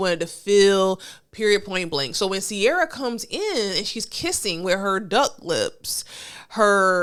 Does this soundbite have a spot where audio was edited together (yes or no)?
no